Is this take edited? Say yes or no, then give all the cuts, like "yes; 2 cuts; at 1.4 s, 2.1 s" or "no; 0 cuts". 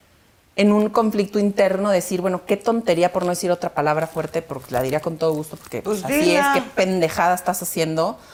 no; 0 cuts